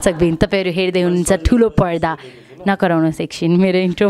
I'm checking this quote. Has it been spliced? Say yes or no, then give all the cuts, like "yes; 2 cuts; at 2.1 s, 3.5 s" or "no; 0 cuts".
no; 0 cuts